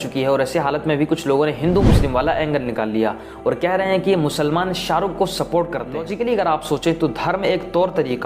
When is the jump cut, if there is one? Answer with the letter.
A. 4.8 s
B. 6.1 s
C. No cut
B